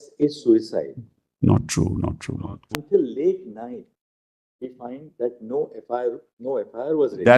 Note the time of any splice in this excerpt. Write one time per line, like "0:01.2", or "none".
0:02.7